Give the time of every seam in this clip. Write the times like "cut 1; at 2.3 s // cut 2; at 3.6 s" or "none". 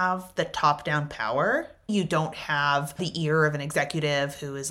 cut 1; at 1.9 s // cut 2; at 3.0 s